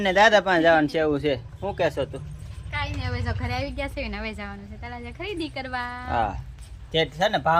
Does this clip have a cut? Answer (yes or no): no